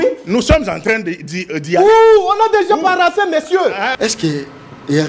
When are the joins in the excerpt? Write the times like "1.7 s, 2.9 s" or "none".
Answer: 3.9 s